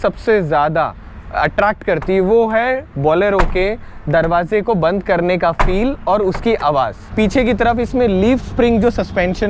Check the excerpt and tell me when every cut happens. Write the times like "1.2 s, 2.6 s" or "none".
7.0 s